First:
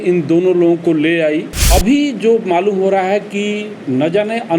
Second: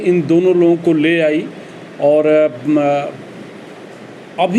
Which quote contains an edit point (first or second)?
first